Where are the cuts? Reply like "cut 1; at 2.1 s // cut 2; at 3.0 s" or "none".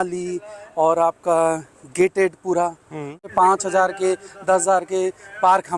cut 1; at 3.3 s

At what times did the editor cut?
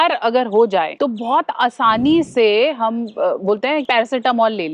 cut 1; at 0.9 s // cut 2; at 3.8 s

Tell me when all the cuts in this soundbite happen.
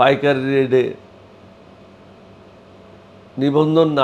none

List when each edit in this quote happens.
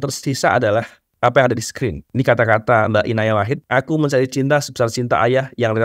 cut 1; at 1.0 s // cut 2; at 2.0 s // cut 3; at 3.6 s

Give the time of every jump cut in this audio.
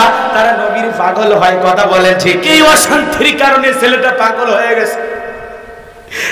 cut 1; at 2.5 s

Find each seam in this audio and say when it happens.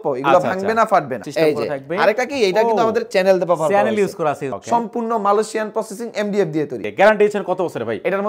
cut 1; at 1.3 s // cut 2; at 4.5 s // cut 3; at 6.9 s

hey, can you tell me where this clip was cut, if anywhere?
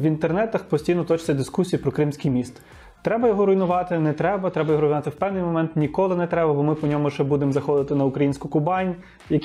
none

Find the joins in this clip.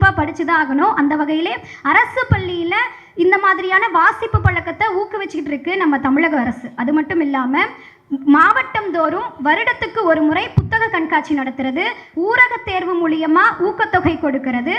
none

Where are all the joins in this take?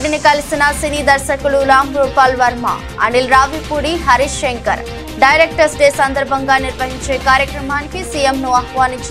none

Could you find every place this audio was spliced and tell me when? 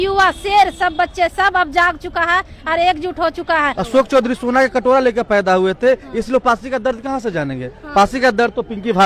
cut 1; at 3.8 s

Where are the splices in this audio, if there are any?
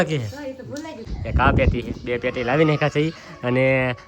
cut 1; at 1.0 s

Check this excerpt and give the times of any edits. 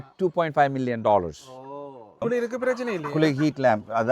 cut 1; at 2.1 s

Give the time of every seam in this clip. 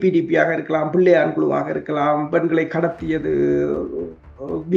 none

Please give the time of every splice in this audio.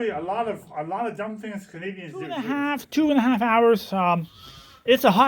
cut 1; at 2.4 s

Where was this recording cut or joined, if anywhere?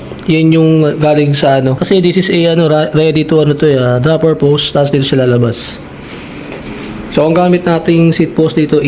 cut 1; at 1.8 s // cut 2; at 6.7 s

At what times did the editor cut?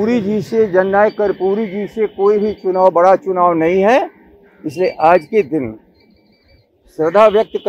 none

